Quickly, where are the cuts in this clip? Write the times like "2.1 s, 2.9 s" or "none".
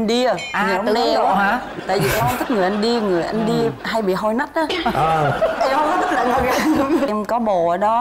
7.1 s

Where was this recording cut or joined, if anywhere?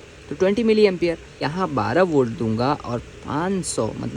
1.5 s

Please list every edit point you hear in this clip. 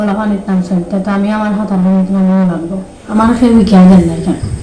3.1 s

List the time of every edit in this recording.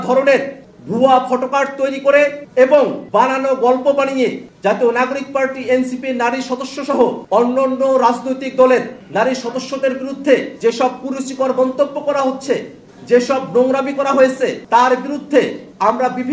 none

